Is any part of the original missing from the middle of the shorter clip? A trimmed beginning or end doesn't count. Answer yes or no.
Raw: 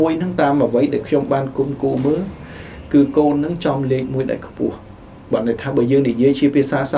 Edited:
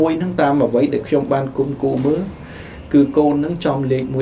no